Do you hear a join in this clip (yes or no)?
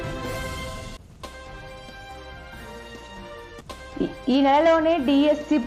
no